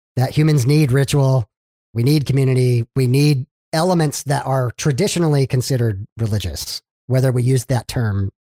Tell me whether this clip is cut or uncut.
uncut